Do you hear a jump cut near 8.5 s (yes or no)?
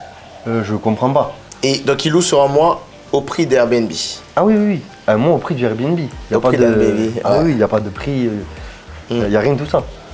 no